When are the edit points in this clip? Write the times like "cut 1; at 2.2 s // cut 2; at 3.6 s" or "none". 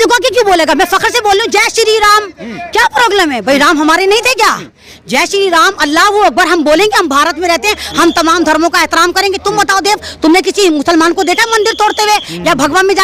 none